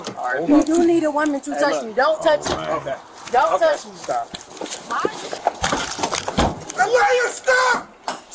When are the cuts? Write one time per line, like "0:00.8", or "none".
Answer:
0:04.8